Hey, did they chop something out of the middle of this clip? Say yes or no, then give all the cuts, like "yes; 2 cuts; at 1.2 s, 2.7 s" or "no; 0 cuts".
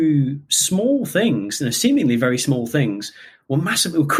no; 0 cuts